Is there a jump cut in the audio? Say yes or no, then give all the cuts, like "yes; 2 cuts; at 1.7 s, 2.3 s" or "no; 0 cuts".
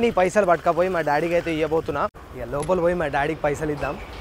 yes; 1 cut; at 2.2 s